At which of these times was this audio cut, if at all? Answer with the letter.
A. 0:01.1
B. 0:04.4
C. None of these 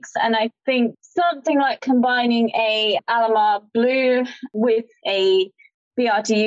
B